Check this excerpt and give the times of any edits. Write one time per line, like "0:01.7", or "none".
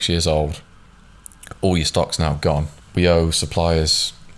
0:02.8